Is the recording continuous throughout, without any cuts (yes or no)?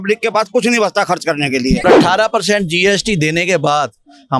no